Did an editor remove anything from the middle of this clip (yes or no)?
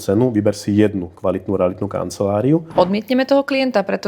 yes